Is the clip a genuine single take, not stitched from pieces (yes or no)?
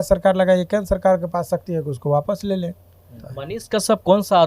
no